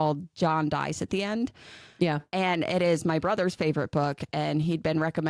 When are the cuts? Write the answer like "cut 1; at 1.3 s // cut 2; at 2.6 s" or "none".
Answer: none